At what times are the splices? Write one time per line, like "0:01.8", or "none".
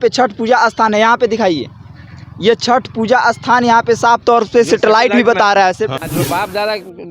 0:06.0